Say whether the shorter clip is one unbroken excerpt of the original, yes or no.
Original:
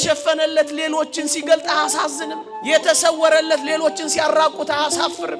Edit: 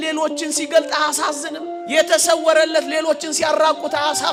yes